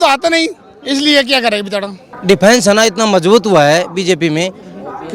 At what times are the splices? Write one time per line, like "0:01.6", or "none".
0:02.2